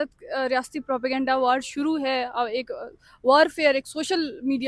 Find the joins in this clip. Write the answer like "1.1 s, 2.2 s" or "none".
none